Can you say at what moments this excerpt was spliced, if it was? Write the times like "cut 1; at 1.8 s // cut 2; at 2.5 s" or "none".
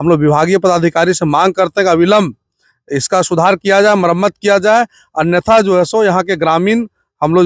none